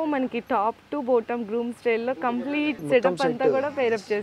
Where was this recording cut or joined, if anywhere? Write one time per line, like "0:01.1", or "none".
0:02.8

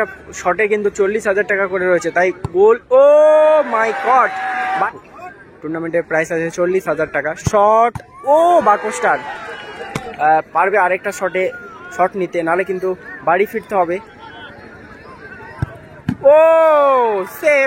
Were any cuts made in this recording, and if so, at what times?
0:04.9
0:10.0

